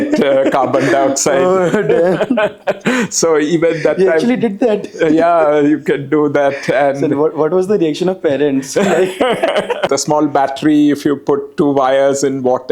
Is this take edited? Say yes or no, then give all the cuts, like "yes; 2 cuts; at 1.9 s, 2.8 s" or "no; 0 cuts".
yes; 1 cut; at 9.9 s